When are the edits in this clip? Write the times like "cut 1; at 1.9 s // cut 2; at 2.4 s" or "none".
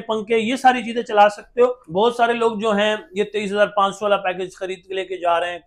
cut 1; at 1.8 s